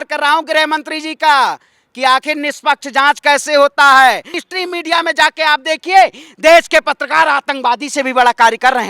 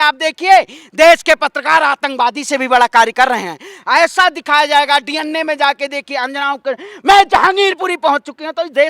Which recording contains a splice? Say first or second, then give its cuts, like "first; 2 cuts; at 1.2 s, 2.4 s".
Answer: first; 1 cut; at 4.4 s